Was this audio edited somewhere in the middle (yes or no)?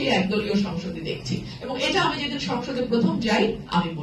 no